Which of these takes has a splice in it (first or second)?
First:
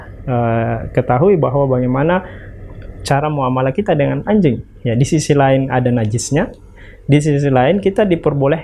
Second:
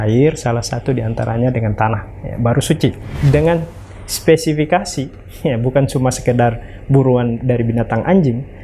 second